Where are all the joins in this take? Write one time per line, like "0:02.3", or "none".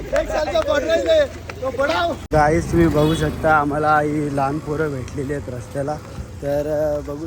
0:02.2